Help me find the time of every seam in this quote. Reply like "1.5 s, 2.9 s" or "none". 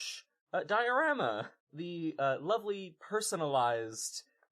1.7 s

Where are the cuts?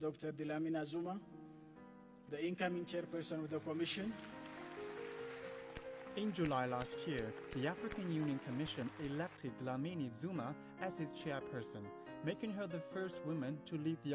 3.3 s

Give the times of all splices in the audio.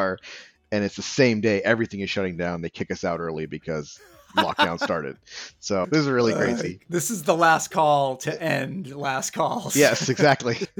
6.8 s

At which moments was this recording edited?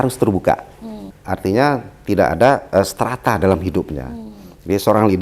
1.1 s

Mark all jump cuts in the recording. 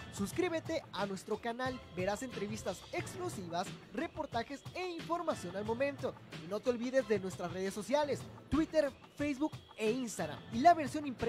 none

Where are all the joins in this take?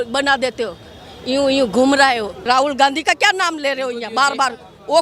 2.4 s

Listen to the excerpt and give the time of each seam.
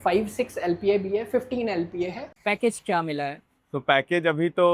2.3 s

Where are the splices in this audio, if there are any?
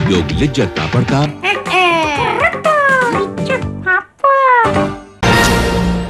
5.1 s

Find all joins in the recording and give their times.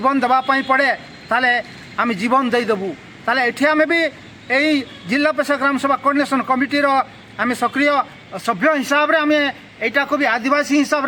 none

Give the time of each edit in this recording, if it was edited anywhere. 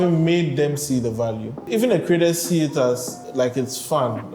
1.7 s, 3.2 s

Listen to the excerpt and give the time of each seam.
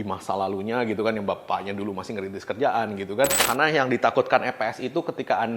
3.4 s

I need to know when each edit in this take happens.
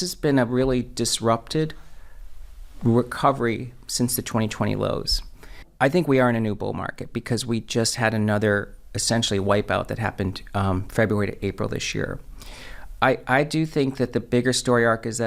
none

